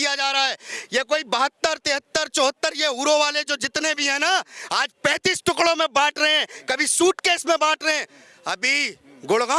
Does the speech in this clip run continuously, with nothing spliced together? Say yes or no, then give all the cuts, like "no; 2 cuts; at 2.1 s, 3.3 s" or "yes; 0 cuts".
yes; 0 cuts